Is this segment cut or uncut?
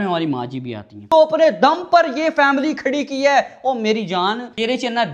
cut